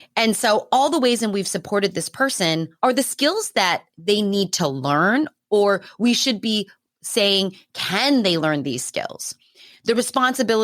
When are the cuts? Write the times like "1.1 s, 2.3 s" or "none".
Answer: 2.7 s